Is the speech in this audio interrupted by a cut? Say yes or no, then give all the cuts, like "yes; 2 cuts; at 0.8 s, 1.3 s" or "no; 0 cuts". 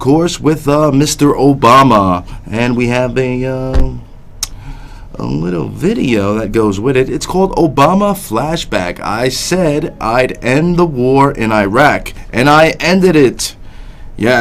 yes; 1 cut; at 3.3 s